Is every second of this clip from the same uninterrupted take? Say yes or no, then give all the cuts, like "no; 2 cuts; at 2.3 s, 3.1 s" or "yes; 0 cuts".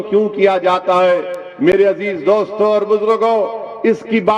yes; 0 cuts